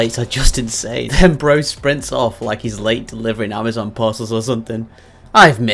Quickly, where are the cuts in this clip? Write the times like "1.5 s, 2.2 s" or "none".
1.0 s